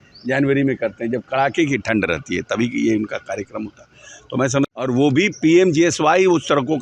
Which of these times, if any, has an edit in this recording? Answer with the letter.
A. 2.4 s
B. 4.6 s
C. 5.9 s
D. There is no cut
B